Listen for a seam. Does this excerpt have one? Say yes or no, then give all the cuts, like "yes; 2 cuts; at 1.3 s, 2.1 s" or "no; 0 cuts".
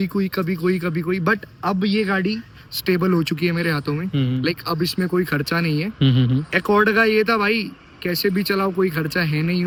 no; 0 cuts